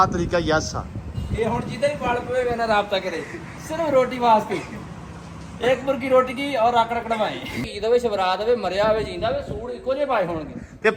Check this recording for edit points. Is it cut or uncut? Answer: cut